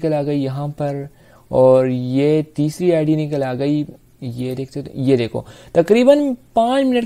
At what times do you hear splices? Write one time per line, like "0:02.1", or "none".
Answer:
none